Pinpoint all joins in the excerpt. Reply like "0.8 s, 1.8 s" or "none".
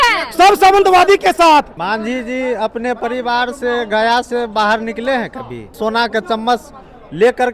1.7 s, 5.8 s